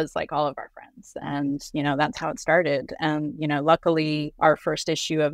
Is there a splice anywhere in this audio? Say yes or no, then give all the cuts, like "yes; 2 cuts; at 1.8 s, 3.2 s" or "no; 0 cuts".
yes; 2 cuts; at 1.0 s, 4.3 s